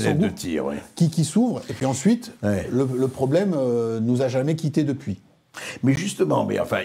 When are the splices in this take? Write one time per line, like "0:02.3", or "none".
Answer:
none